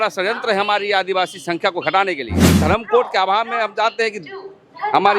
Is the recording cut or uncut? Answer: cut